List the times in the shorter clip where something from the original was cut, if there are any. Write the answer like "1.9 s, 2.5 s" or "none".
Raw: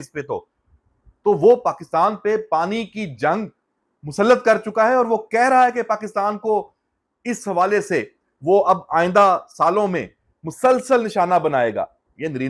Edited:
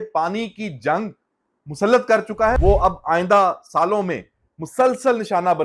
2.6 s